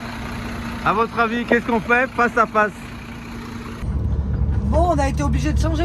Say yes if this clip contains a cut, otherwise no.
yes